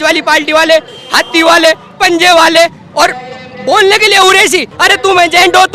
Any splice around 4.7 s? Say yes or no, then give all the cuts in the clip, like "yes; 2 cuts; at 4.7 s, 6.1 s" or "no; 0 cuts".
yes; 1 cut; at 4.7 s